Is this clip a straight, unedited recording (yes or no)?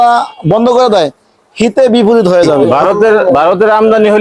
no